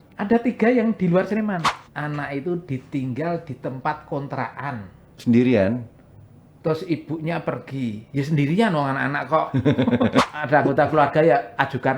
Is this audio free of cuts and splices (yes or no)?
no